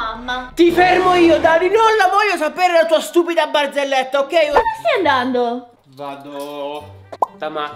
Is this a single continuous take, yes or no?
no